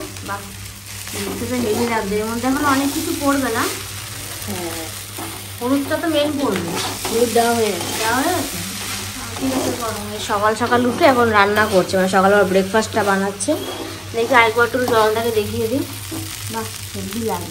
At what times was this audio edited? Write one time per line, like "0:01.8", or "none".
none